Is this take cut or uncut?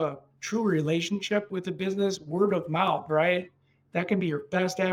cut